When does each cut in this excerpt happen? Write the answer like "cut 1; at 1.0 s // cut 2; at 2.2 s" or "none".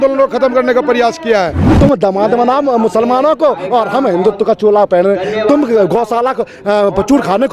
cut 1; at 1.7 s